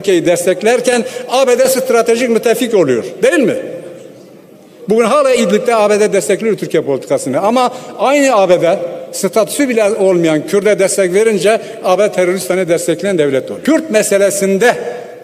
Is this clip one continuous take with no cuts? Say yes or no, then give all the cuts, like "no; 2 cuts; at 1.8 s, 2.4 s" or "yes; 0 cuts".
no; 1 cut; at 13.5 s